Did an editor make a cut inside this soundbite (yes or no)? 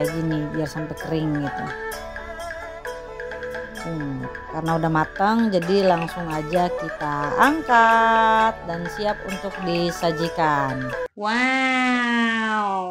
yes